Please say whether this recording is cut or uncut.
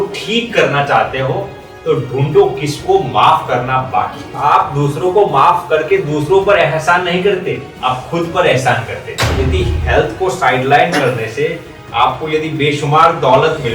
cut